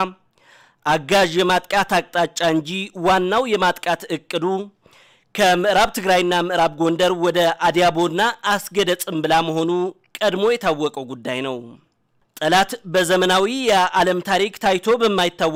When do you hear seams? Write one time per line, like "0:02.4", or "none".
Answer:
none